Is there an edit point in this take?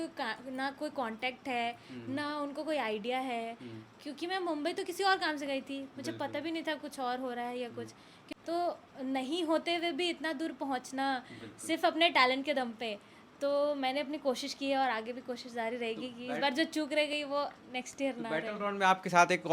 no; 0 cuts

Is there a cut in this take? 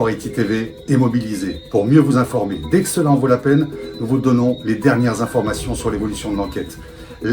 no; 0 cuts

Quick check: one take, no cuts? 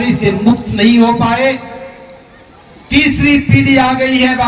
yes; 0 cuts

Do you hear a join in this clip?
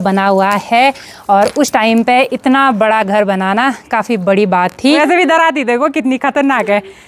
yes; 1 cut; at 5.0 s

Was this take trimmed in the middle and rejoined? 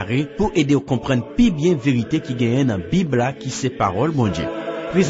no; 0 cuts

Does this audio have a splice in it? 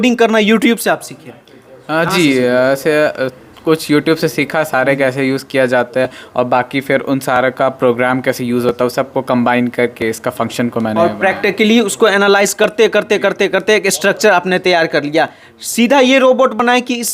no; 0 cuts

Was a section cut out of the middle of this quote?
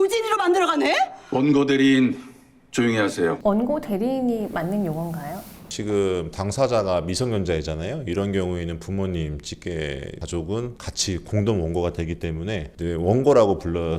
yes; 2 cuts; at 3.4 s, 5.6 s

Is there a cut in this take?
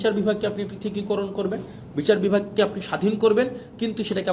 no; 0 cuts

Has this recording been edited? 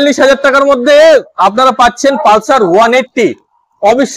no; 0 cuts

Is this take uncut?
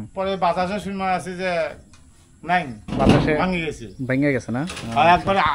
yes; 0 cuts

